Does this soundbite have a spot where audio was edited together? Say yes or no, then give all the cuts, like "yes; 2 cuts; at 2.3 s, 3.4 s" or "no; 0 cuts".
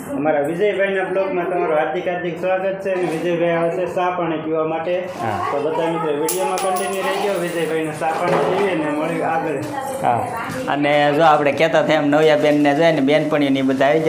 no; 0 cuts